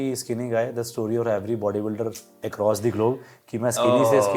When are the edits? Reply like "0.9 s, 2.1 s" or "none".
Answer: none